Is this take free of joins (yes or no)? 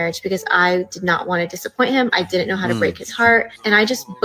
yes